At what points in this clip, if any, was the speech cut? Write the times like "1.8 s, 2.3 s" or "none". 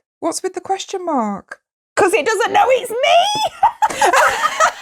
none